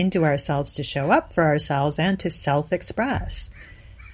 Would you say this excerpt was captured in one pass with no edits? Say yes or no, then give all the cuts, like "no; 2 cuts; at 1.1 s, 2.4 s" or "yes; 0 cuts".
yes; 0 cuts